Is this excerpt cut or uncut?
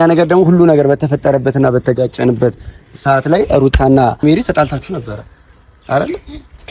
cut